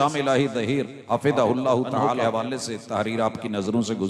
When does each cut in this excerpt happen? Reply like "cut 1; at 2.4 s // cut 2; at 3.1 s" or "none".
cut 1; at 1.0 s // cut 2; at 2.2 s